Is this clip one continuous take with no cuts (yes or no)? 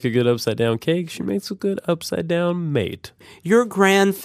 no